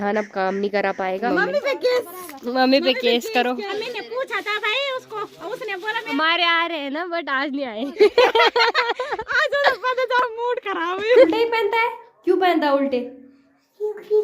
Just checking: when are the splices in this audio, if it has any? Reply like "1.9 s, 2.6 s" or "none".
1.2 s, 3.7 s, 6.1 s, 11.3 s